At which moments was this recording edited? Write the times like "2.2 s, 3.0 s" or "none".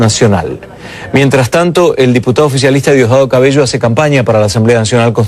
1.8 s